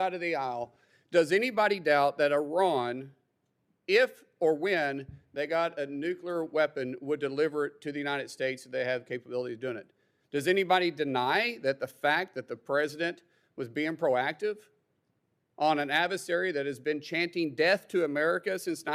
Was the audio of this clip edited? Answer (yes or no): no